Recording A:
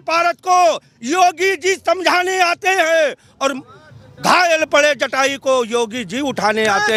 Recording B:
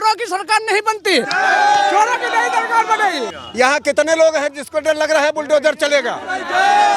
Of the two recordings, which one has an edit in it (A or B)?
B